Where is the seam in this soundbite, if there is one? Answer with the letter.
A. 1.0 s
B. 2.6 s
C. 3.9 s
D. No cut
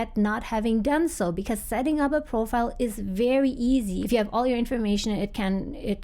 C